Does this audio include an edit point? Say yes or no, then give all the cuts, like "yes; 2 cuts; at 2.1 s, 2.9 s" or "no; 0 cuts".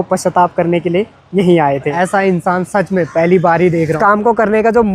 yes; 2 cuts; at 1.9 s, 3.9 s